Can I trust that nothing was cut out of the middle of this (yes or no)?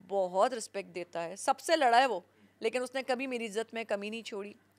yes